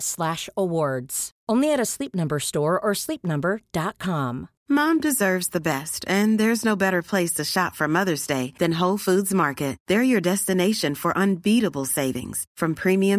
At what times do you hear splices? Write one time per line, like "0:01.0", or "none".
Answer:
0:04.5